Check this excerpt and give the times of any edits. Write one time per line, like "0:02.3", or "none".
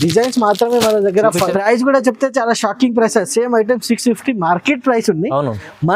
0:01.5

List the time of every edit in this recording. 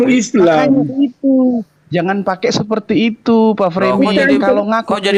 none

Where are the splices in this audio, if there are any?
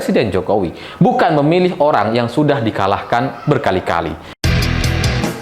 0:04.2

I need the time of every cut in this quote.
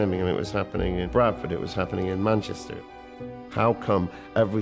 0:01.0
0:03.2

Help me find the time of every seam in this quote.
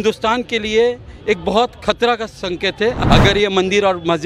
0:03.0

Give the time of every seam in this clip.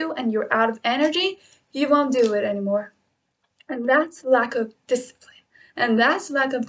none

